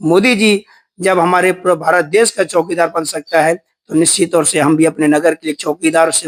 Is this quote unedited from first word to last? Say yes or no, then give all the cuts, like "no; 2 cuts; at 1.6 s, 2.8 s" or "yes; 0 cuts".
yes; 0 cuts